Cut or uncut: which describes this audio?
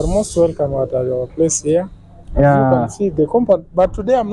uncut